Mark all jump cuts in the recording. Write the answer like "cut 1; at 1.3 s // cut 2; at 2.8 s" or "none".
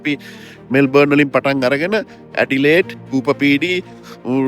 cut 1; at 3.0 s